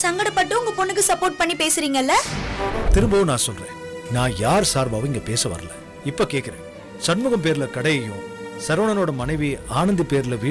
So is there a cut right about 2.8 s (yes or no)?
yes